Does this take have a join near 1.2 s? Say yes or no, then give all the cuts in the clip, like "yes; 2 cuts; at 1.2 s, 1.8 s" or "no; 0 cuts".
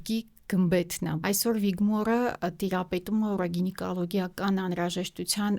yes; 1 cut; at 1.2 s